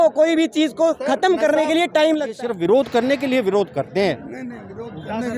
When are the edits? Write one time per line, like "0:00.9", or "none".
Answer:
0:02.3